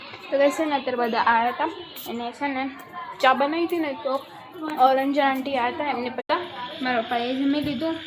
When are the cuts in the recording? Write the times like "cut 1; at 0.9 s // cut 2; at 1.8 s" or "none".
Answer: cut 1; at 6.3 s